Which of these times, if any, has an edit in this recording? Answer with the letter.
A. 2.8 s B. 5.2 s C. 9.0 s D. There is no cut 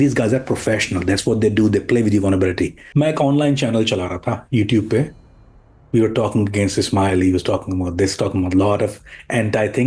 A